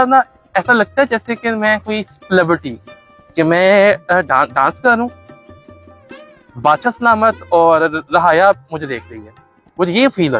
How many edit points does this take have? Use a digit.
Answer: 0